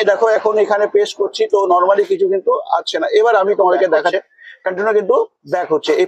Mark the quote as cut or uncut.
cut